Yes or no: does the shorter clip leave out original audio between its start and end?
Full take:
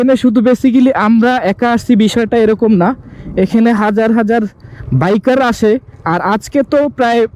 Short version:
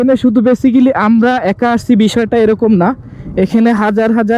no